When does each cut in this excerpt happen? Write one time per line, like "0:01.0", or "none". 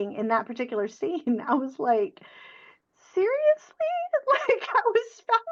none